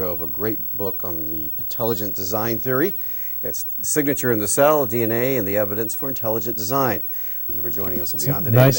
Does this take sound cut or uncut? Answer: cut